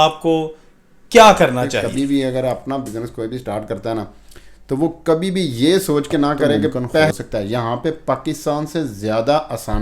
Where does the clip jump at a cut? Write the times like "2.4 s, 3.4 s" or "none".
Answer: 1.8 s, 7.1 s